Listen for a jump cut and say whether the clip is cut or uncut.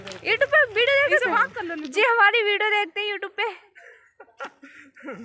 uncut